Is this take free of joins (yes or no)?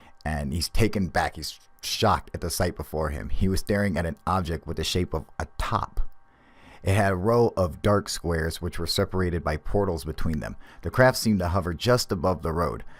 no